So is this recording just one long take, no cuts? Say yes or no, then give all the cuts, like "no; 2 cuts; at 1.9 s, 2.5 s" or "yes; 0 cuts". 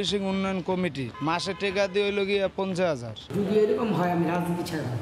no; 1 cut; at 3.2 s